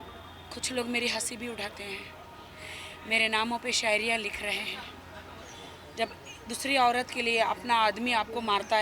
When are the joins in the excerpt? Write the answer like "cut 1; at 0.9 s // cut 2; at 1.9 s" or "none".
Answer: cut 1; at 5.4 s

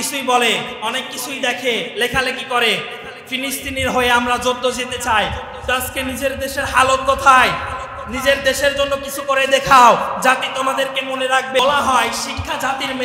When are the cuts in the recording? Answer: cut 1; at 11.6 s

